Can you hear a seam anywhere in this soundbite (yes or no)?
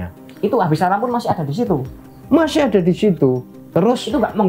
yes